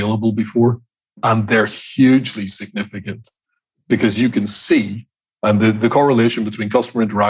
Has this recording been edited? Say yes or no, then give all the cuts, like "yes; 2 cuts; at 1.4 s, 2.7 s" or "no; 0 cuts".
yes; 1 cut; at 1.2 s